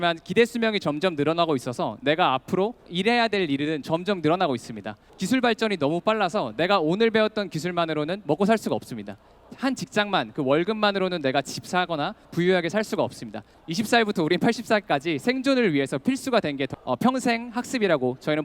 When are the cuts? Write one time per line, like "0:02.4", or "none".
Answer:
0:02.9
0:05.1
0:09.4
0:13.5
0:16.7